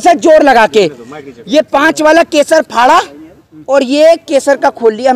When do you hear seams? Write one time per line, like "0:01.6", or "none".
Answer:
none